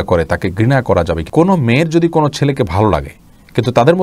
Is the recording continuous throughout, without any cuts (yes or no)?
no